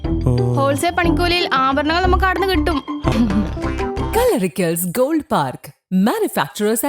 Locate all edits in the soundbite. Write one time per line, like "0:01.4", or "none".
0:03.1

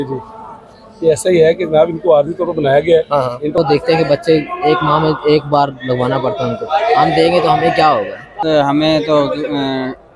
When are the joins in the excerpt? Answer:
0:03.6
0:08.4

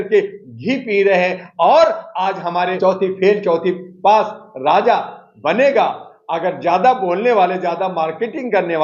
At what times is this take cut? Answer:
0:02.7

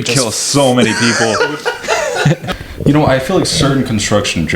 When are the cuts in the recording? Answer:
0:02.5

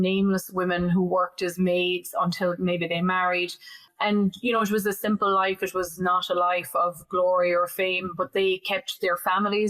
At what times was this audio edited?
0:03.9

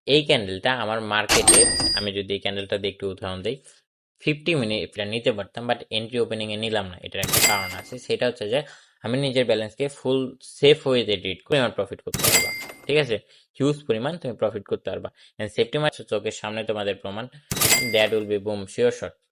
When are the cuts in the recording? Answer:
0:05.0
0:11.4
0:15.9

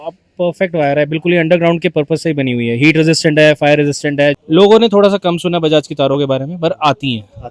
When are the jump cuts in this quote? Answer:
0:04.4

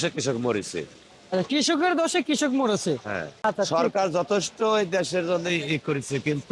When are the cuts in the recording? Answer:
0:03.4

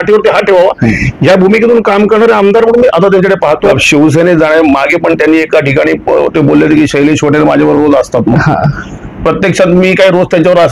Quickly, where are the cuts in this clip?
0:03.8

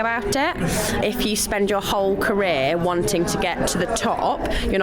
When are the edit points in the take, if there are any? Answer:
0:01.0

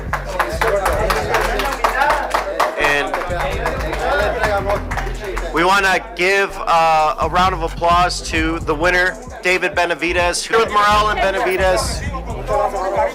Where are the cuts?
none

